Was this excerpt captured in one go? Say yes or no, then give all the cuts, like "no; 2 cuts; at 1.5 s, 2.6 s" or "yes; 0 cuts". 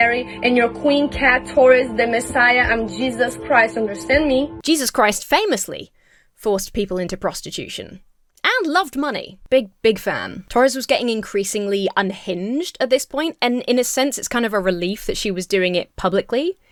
yes; 0 cuts